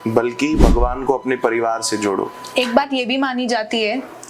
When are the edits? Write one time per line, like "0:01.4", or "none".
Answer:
0:02.4